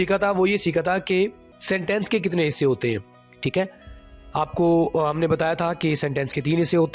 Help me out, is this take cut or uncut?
cut